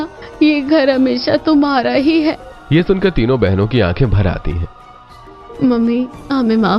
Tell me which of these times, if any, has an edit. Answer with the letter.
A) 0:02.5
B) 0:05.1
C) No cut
A